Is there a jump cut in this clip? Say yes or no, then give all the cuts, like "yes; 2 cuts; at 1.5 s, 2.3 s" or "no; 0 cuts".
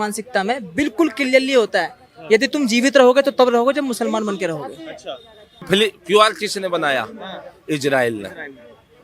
yes; 1 cut; at 5.7 s